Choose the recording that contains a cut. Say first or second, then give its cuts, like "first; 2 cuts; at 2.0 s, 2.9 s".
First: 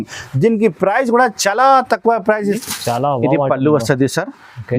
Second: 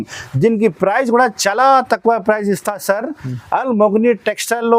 first; 1 cut; at 2.7 s